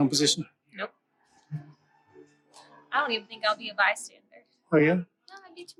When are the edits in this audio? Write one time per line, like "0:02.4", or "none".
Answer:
none